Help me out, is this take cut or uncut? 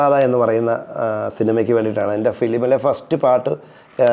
uncut